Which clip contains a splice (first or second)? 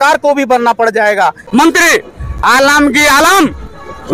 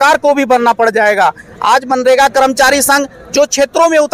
first